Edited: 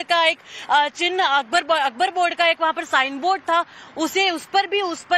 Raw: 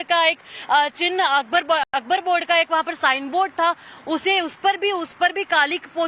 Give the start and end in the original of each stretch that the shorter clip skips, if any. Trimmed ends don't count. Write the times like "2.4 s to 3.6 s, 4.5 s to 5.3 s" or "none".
1.8 s to 2.0 s

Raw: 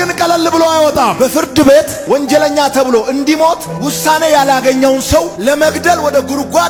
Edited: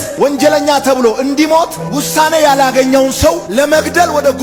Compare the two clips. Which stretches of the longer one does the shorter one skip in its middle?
none

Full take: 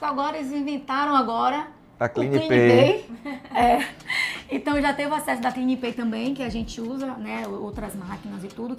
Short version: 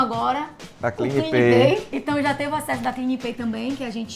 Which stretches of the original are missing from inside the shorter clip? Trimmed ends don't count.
3.1 s to 4.5 s

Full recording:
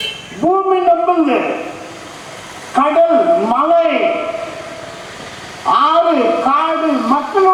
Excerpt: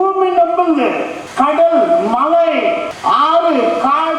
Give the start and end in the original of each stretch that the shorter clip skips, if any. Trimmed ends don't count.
1.7 s to 2.6 s, 4.3 s to 5.5 s

